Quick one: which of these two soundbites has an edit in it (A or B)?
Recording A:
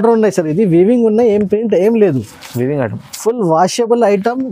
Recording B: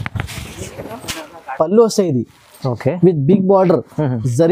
B